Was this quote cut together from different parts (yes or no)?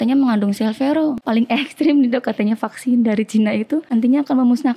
yes